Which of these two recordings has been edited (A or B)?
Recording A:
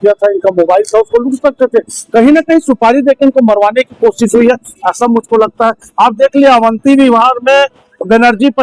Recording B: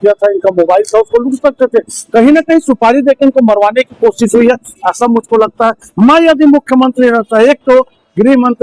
B